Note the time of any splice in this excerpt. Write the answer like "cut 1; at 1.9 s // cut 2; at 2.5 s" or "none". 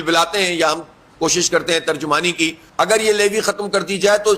cut 1; at 2.6 s